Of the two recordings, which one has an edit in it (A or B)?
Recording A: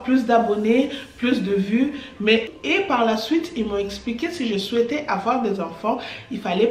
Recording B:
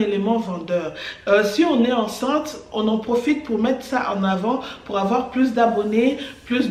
A